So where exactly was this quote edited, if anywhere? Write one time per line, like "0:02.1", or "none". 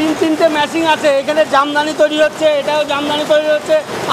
none